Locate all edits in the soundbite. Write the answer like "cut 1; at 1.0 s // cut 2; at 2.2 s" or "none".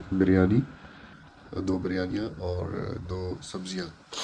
none